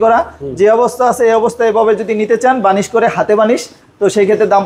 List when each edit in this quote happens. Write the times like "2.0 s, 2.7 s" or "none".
none